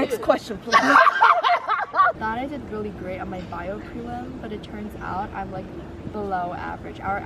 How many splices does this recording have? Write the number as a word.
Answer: one